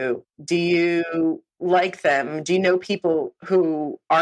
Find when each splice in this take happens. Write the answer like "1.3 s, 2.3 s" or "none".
none